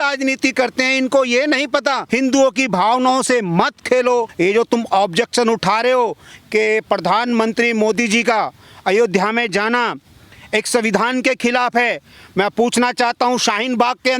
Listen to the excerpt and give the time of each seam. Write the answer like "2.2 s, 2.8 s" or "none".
2.0 s, 4.3 s